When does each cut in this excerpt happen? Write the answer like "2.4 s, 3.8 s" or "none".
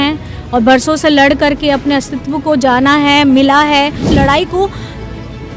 4.0 s

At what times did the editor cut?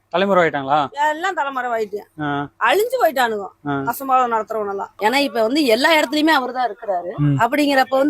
4.9 s

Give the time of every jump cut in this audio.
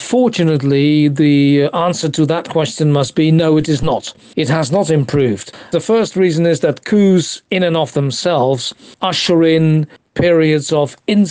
5.5 s

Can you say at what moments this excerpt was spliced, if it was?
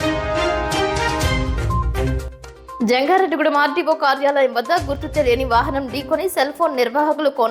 2.8 s

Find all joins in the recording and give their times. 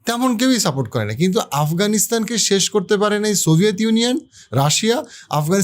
none

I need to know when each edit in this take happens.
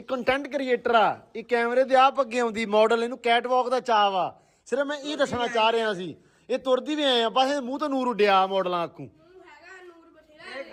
none

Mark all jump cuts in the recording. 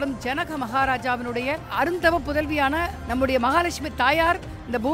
1.7 s, 3.0 s

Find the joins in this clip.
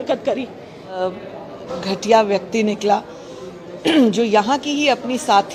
1.0 s

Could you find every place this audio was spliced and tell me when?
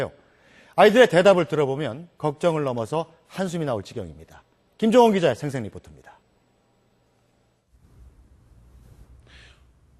none

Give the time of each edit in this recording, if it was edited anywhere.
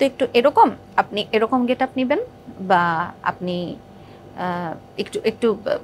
none

